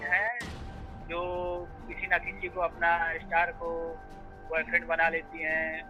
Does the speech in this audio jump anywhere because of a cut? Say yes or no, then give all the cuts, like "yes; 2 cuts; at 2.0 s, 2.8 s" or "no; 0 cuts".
no; 0 cuts